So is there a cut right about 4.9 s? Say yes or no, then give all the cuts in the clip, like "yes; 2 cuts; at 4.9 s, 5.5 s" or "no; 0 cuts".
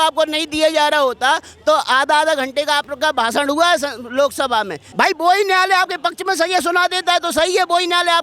yes; 1 cut; at 4.9 s